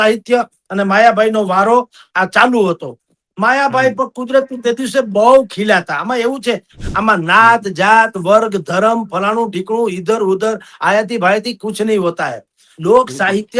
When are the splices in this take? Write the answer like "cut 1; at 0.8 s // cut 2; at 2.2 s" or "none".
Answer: cut 1; at 6.7 s